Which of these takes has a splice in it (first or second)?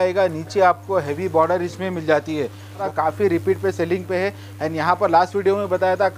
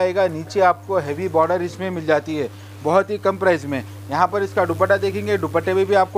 first